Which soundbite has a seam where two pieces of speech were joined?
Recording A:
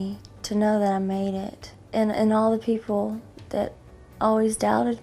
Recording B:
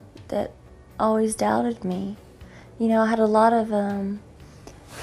A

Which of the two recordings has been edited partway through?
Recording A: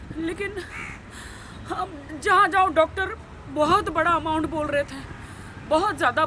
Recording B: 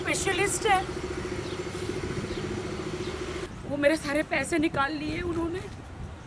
B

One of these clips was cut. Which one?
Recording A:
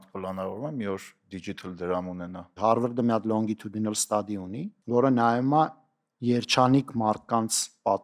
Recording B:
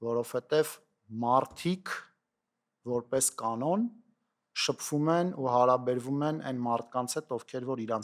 A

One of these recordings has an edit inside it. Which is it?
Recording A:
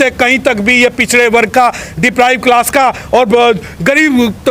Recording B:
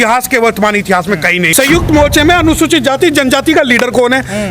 B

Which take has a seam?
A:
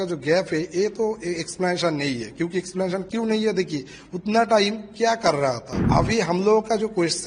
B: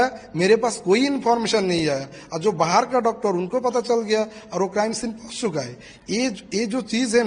A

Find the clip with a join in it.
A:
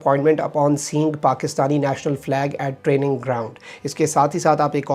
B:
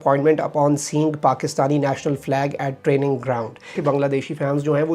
B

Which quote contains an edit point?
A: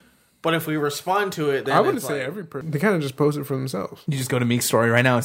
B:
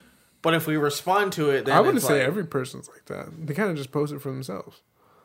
A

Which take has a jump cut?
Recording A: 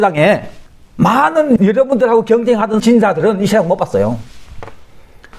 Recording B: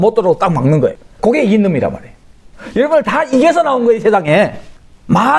B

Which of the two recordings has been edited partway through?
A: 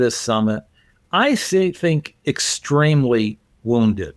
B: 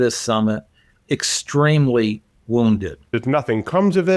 B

